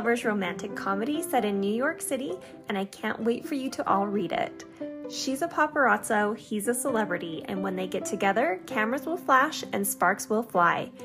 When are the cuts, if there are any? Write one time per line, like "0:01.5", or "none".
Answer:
none

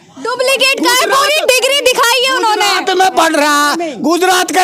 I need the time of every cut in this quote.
none

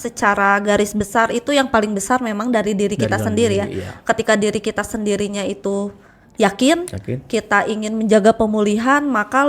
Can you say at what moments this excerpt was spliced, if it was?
none

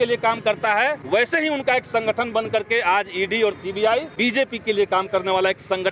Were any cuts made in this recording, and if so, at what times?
0:01.0
0:04.1

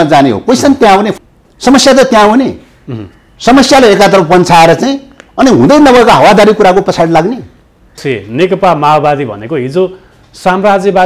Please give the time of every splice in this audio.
0:01.1
0:08.0

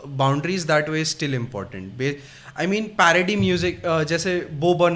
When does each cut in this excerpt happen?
none

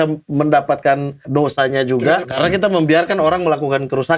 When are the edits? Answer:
0:01.2
0:02.3

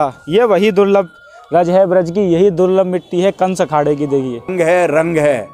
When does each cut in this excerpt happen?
0:04.5

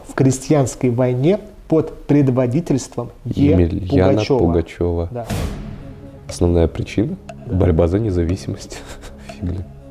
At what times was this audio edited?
none

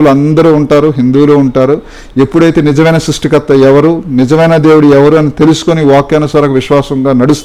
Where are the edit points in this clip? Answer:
none

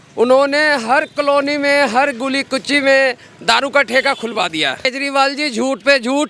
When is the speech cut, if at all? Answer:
0:04.9

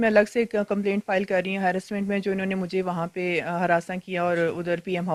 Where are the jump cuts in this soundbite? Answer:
none

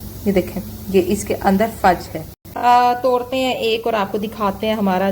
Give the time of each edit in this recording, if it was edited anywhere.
0:02.4

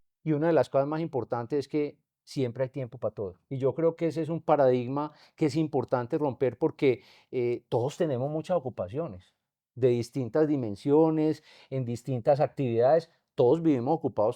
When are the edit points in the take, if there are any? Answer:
0:03.4

